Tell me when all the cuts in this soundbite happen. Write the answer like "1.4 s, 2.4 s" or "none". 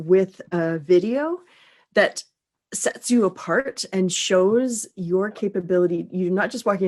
none